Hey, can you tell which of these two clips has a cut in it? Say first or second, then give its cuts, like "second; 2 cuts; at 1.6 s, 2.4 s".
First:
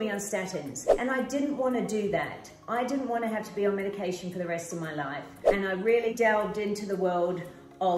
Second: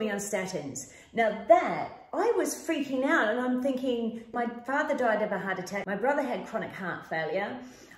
first; 2 cuts; at 1.0 s, 5.4 s